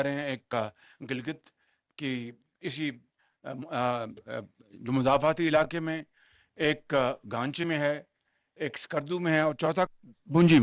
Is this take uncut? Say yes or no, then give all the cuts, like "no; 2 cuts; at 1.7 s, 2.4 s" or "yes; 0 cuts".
yes; 0 cuts